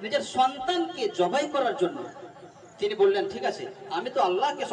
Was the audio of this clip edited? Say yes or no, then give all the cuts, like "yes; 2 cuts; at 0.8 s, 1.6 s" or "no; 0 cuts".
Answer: no; 0 cuts